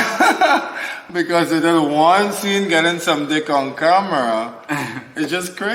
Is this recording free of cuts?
yes; 0 cuts

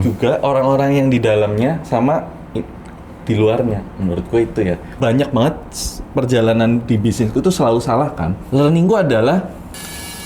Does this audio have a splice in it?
yes; 2 cuts; at 5.0 s, 8.4 s

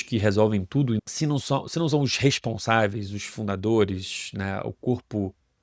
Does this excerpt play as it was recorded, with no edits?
no; 1 cut; at 1.0 s

